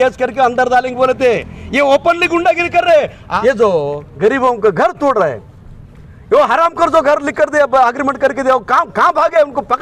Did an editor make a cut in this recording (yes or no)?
yes